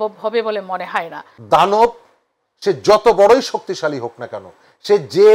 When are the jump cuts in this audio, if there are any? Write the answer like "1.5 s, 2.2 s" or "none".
1.3 s